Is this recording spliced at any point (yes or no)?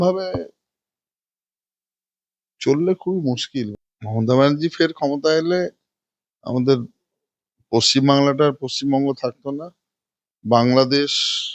yes